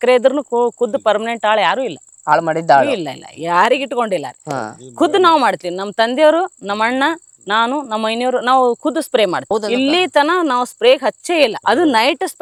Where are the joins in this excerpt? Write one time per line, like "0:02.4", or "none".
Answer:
none